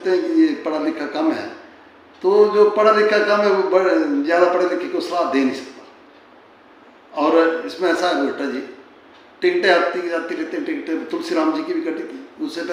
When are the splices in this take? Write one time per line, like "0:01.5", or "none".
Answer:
none